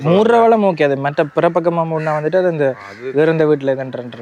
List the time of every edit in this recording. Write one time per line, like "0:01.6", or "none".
none